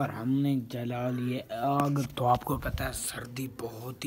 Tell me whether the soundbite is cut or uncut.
uncut